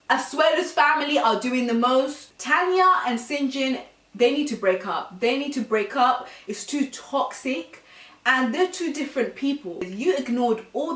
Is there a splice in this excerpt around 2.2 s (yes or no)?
yes